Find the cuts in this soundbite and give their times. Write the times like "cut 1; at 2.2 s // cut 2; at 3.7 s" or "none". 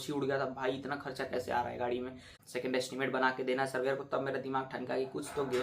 cut 1; at 2.3 s

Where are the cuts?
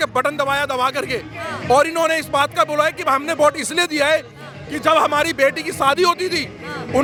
none

